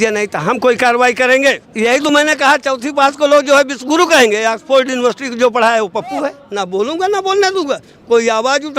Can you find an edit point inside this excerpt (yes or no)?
yes